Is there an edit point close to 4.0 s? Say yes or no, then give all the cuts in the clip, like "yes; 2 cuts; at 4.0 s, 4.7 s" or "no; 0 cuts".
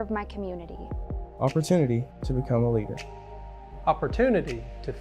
no; 0 cuts